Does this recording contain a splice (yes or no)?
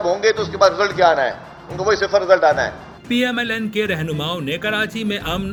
no